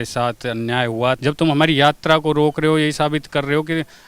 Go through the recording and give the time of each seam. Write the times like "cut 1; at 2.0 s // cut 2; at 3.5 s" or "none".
cut 1; at 1.2 s